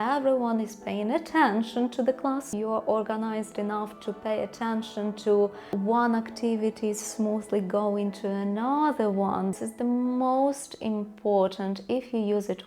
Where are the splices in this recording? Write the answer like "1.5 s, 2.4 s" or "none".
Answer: 2.5 s, 5.7 s, 9.6 s